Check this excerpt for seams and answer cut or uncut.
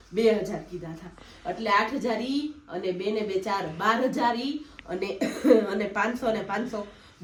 uncut